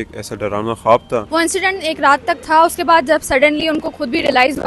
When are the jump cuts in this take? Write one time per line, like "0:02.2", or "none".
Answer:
0:01.3
0:02.4

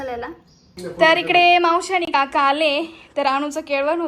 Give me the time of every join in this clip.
0:01.0

